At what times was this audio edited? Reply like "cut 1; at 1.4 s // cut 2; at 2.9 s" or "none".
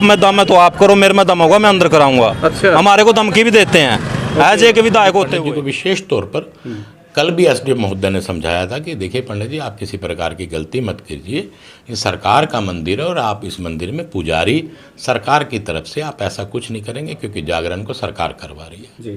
cut 1; at 5.4 s